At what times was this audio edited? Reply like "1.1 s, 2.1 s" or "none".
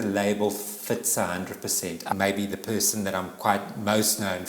2.1 s